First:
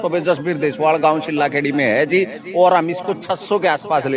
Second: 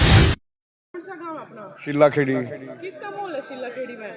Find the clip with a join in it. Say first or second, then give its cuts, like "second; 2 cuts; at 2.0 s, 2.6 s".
second; 1 cut; at 0.9 s